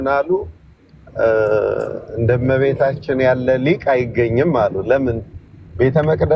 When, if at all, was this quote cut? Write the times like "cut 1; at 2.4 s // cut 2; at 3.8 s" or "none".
none